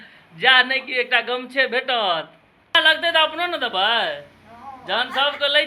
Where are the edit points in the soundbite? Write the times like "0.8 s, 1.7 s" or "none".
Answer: 2.8 s